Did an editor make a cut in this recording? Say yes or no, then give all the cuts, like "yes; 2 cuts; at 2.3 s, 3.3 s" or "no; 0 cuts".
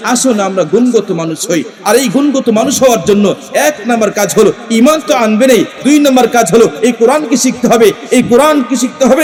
no; 0 cuts